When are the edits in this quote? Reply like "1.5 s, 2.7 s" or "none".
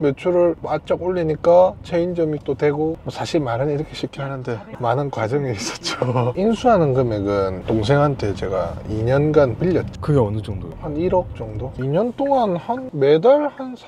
9.9 s, 11.8 s